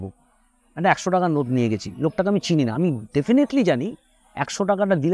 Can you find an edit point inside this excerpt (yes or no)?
no